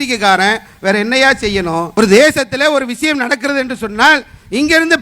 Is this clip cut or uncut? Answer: cut